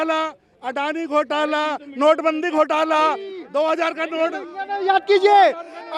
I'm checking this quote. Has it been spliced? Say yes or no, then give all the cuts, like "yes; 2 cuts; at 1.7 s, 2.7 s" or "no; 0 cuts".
no; 0 cuts